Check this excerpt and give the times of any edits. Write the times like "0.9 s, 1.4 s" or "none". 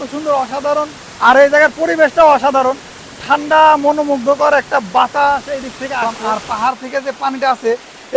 6.2 s